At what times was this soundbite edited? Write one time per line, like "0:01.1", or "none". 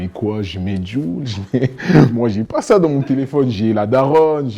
0:02.1